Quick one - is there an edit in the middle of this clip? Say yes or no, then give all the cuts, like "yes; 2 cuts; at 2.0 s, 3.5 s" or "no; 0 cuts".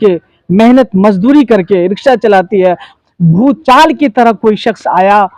yes; 1 cut; at 2.9 s